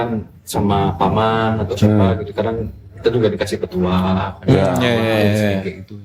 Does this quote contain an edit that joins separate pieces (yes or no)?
no